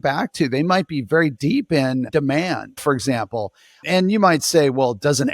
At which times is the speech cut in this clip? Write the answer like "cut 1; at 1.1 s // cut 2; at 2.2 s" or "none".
cut 1; at 2.1 s